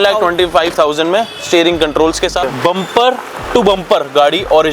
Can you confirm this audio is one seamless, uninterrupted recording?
no; 1 cut; at 2.4 s

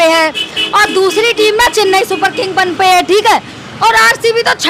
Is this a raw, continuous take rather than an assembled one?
yes; 0 cuts

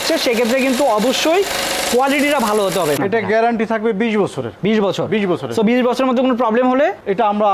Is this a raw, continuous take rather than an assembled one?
no; 1 cut; at 3.0 s

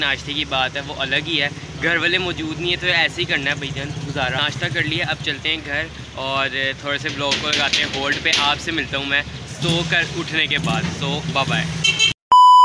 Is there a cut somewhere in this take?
no; 0 cuts

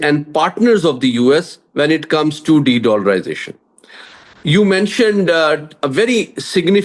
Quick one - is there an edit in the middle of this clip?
no; 0 cuts

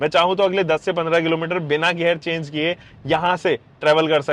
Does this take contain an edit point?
no; 0 cuts

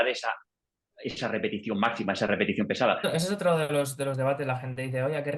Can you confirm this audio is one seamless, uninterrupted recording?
no; 1 cut; at 3.0 s

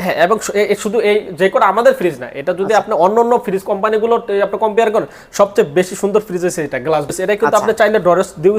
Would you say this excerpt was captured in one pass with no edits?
no; 1 cut; at 7.1 s

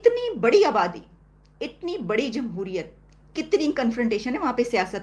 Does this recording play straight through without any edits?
yes; 0 cuts

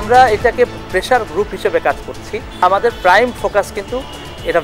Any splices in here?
yes; 1 cut; at 2.6 s

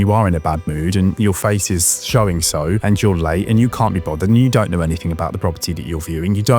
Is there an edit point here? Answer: yes; 1 cut; at 2.8 s

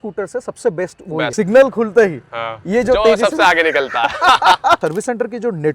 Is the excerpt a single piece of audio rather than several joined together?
no; 2 cuts; at 1.3 s, 4.8 s

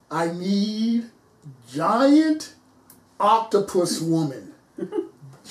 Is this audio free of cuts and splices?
yes; 0 cuts

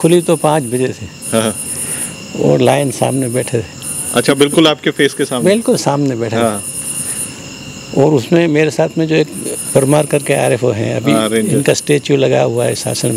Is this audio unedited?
yes; 0 cuts

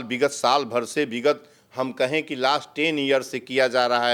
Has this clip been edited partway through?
no; 0 cuts

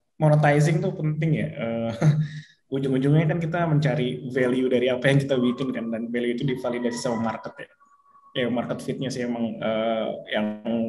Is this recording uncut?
yes; 0 cuts

